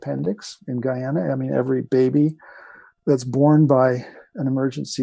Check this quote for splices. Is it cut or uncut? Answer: uncut